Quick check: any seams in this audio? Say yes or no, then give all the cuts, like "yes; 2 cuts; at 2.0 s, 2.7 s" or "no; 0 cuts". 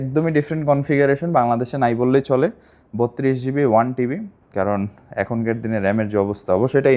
no; 0 cuts